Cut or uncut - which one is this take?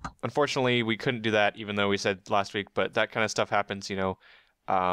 cut